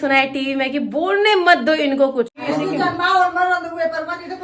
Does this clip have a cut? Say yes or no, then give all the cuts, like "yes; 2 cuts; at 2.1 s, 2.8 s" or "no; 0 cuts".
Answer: yes; 1 cut; at 2.4 s